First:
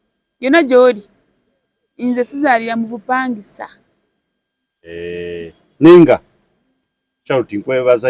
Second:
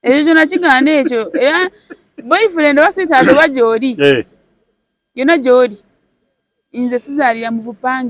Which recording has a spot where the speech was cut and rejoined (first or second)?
first